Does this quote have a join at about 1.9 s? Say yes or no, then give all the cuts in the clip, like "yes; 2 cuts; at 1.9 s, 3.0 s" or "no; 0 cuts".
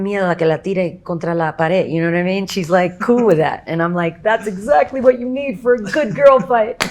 yes; 1 cut; at 1.9 s